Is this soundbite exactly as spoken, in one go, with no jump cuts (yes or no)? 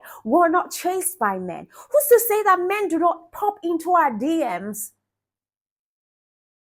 yes